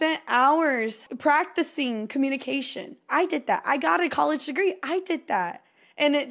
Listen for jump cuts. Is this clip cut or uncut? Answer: cut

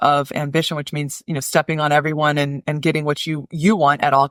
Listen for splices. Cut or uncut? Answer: uncut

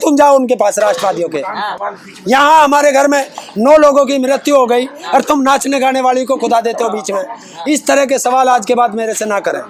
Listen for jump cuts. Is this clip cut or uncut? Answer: uncut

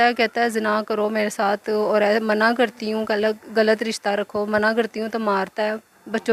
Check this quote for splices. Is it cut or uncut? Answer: uncut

